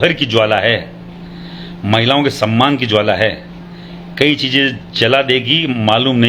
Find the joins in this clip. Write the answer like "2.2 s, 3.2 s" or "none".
none